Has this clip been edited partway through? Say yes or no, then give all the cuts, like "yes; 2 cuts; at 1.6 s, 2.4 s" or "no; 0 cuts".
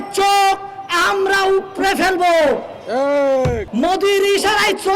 yes; 1 cut; at 3.6 s